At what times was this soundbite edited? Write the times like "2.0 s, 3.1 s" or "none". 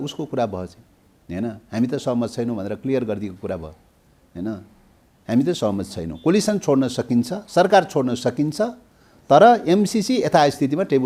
none